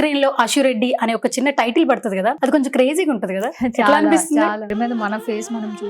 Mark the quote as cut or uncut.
cut